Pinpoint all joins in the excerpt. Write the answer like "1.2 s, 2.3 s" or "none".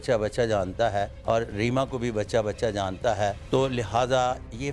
1.1 s, 3.4 s